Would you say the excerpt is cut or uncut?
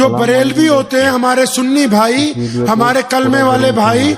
uncut